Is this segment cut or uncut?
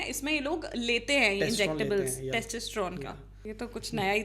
cut